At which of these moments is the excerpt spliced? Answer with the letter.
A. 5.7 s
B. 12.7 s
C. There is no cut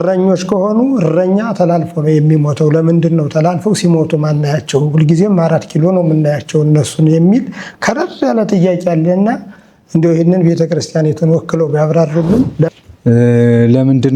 B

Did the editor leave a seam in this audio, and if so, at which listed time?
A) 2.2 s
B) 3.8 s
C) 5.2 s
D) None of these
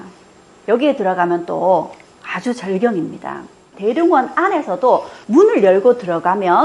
B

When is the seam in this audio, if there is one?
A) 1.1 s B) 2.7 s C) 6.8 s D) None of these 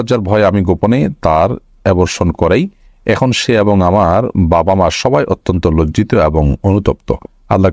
D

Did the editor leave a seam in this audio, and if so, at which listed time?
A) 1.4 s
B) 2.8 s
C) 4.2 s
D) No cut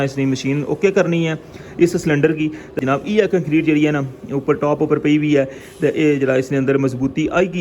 B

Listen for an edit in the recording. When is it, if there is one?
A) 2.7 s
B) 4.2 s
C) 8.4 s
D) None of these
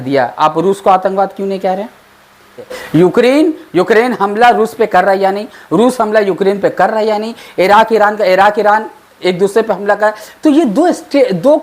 A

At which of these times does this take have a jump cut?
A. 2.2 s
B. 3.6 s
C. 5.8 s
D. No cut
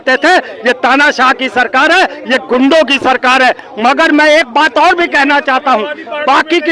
D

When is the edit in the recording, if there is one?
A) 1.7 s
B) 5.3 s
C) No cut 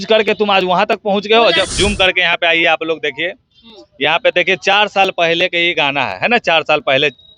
A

